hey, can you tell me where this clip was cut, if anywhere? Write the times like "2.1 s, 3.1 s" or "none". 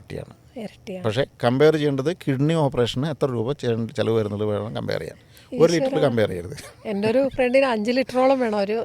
none